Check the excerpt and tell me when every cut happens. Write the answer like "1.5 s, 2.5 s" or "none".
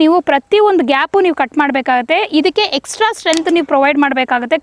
none